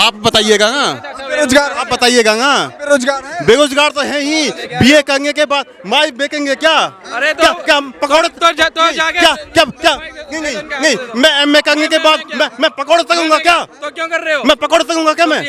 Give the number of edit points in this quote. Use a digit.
0